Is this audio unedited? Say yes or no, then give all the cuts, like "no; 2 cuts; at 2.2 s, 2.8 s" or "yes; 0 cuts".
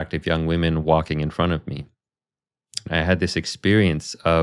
no; 1 cut; at 2.9 s